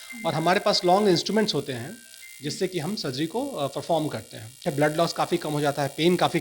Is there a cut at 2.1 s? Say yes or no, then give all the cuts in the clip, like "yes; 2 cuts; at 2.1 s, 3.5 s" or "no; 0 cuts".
no; 1 cut; at 4.6 s